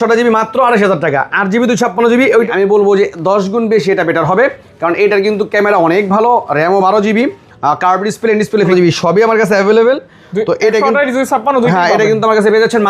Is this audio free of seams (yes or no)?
no